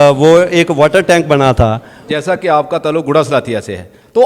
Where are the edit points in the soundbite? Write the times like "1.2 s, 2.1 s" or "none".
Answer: 2.4 s